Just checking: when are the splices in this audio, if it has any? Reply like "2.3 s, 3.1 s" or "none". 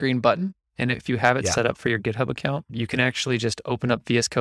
1.0 s, 2.7 s